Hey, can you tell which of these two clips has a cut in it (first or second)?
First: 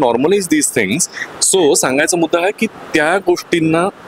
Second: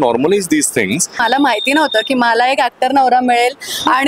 second